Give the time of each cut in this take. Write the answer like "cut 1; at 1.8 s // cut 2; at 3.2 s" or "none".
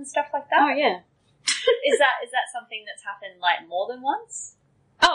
none